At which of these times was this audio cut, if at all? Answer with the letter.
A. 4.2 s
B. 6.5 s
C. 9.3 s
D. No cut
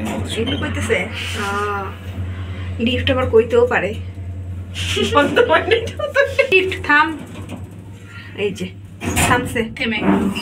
B